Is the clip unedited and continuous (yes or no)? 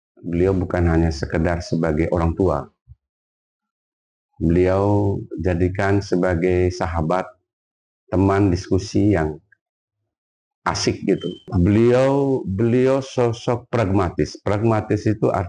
no